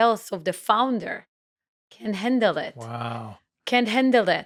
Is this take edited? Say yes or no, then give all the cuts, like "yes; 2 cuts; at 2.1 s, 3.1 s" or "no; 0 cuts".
no; 0 cuts